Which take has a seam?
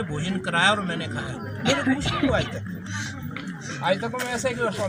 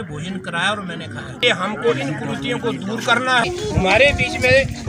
second; 2 cuts; at 1.4 s, 3.4 s

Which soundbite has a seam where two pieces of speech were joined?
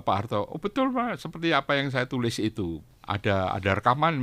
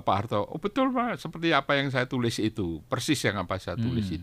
first; 1 cut; at 2.8 s

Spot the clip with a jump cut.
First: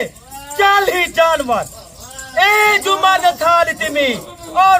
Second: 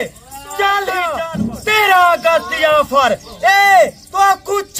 second; 1 cut; at 1.1 s

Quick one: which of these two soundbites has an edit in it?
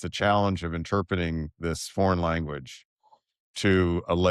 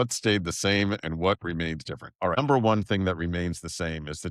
second; 1 cut; at 2.4 s

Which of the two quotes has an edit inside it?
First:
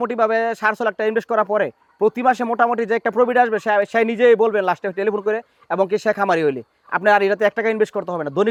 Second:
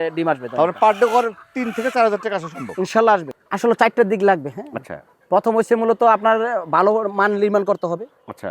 second; 1 cut; at 3.4 s

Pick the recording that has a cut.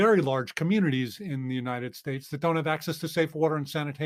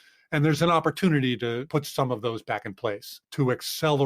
second; 2 cuts; at 1.6 s, 3.2 s

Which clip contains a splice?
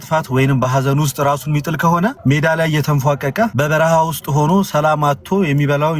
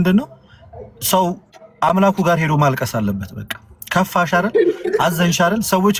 first; 2 cuts; at 2.2 s, 3.5 s

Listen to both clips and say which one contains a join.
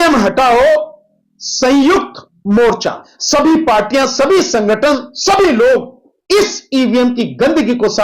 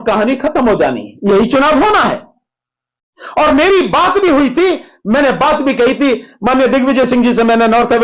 first; 1 cut; at 3.1 s

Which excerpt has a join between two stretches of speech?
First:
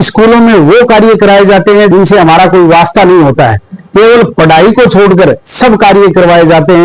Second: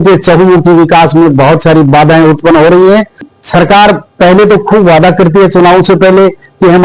second; 1 cut; at 3.3 s

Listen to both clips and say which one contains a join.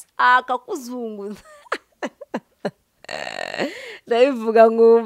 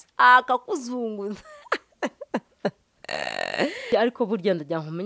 second; 1 cut; at 3.8 s

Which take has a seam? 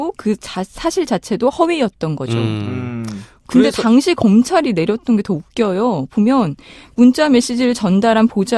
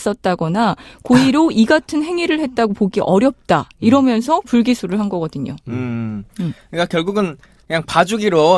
second; 1 cut; at 4.1 s

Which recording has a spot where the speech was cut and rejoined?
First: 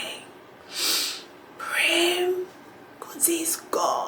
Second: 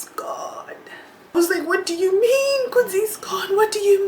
second; 1 cut; at 1.3 s

